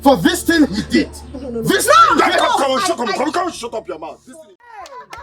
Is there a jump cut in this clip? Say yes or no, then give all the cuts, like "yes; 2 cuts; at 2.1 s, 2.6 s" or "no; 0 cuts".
yes; 1 cut; at 4.1 s